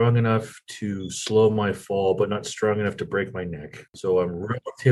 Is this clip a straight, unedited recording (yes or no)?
no